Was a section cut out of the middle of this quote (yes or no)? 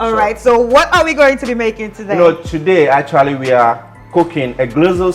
no